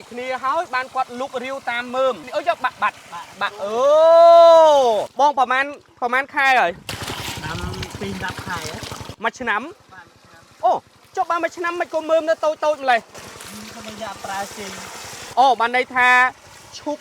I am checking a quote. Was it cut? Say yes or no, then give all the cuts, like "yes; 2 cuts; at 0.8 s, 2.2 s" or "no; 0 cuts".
yes; 3 cuts; at 2.2 s, 5.1 s, 7.9 s